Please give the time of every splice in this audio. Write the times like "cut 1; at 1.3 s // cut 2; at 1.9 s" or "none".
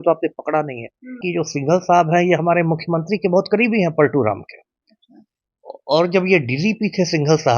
cut 1; at 1.2 s